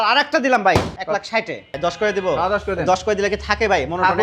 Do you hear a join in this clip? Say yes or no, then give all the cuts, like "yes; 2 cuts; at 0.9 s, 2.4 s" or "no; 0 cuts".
yes; 1 cut; at 1.1 s